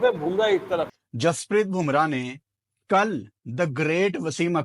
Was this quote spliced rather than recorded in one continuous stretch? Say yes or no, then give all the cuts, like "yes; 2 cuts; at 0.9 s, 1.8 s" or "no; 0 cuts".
yes; 1 cut; at 1.0 s